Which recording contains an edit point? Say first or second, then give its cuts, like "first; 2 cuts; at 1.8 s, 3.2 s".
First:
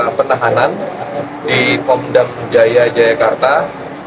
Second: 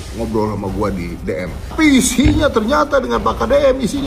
second; 1 cut; at 1.7 s